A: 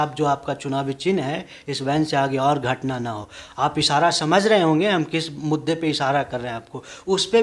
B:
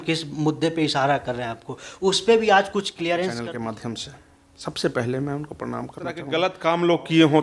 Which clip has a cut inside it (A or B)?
B